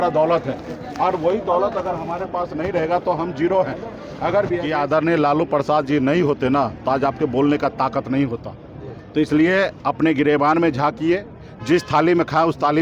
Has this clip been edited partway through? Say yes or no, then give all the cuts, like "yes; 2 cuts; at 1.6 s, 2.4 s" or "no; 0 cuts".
yes; 1 cut; at 4.7 s